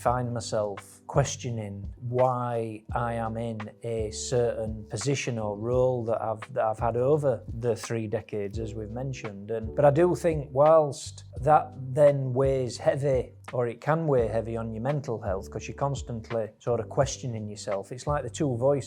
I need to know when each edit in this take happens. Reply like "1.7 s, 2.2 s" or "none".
none